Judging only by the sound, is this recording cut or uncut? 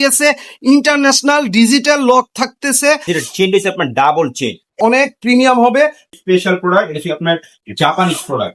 cut